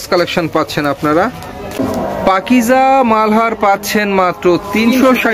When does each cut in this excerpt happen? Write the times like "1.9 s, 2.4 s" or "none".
1.8 s

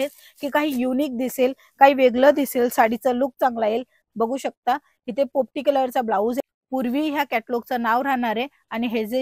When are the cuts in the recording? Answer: 6.4 s

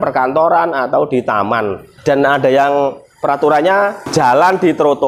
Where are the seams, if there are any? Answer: 1.9 s, 4.0 s

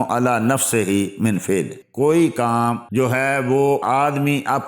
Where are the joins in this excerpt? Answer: 1.8 s, 2.8 s, 3.8 s

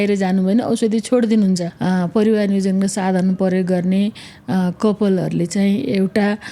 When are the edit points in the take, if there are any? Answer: 1.7 s

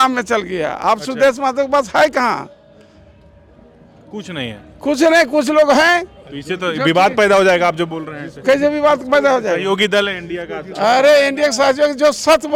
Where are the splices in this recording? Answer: none

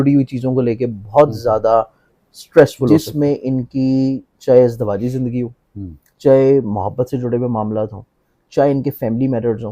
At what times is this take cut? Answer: 2.9 s

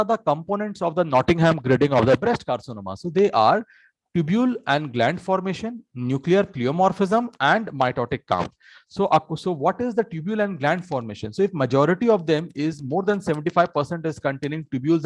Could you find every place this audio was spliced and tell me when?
none

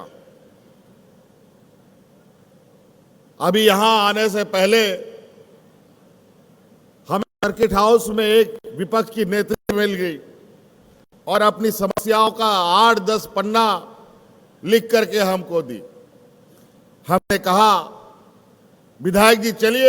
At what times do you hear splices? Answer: none

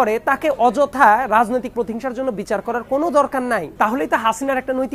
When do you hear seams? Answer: 3.7 s

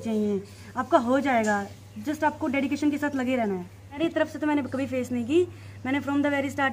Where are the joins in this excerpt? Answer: 4.0 s

